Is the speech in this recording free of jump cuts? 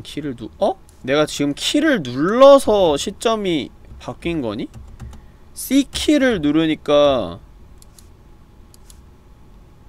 no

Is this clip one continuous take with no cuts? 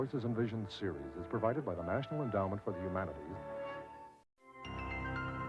no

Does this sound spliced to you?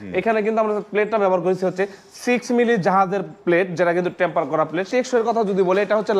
yes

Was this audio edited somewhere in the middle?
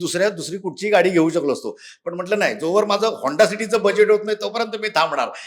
no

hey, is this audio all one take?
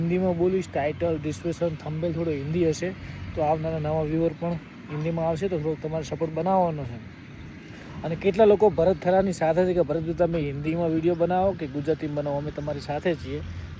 yes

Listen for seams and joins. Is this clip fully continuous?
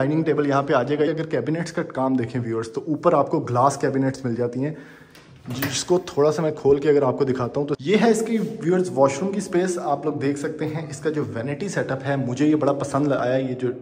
no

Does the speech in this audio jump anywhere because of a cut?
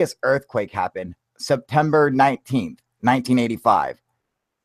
no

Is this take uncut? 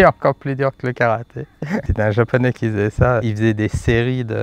no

